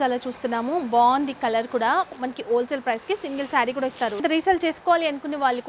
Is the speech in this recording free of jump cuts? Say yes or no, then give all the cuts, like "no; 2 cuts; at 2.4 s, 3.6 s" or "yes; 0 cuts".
no; 2 cuts; at 2.2 s, 4.2 s